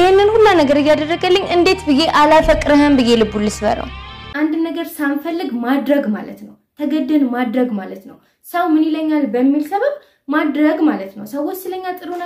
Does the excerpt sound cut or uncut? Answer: cut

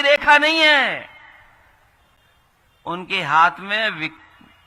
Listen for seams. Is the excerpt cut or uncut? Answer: uncut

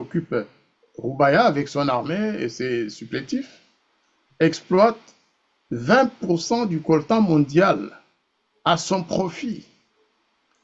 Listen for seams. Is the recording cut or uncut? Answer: uncut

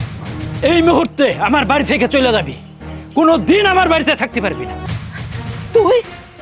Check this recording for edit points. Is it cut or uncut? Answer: cut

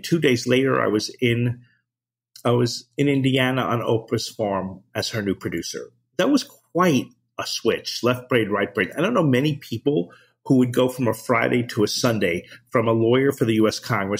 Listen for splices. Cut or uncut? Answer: uncut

